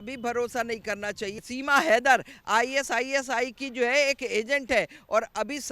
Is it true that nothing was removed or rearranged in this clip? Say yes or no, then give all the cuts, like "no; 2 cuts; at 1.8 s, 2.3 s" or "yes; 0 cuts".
no; 1 cut; at 1.3 s